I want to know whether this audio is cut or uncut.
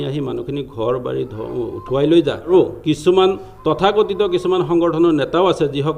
cut